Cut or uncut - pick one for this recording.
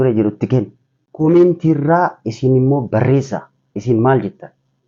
uncut